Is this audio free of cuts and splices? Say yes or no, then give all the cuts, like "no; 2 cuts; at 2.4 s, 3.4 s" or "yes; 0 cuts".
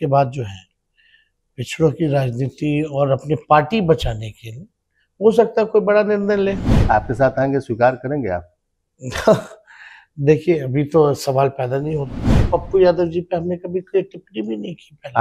no; 1 cut; at 12.4 s